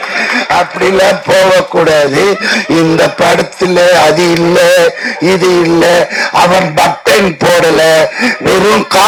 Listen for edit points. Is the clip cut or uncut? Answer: uncut